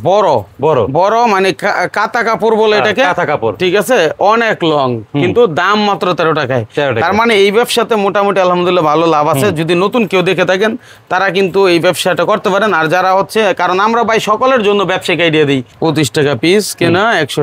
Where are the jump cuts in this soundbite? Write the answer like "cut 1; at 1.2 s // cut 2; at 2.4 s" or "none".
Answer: cut 1; at 15.7 s